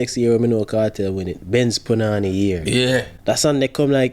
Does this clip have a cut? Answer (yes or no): yes